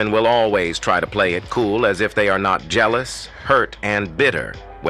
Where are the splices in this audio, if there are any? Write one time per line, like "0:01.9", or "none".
none

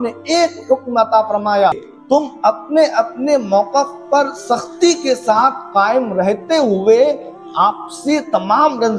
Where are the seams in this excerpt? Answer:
0:01.7

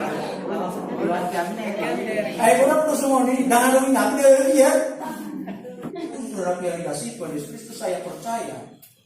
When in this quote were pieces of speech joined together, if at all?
0:06.1

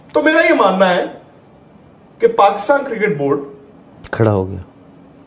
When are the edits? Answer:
none

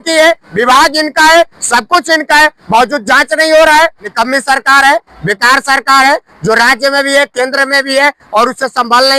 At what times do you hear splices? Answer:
0:04.0

